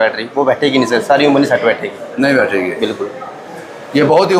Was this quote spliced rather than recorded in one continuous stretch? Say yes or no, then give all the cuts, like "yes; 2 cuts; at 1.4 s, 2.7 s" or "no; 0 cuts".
no; 0 cuts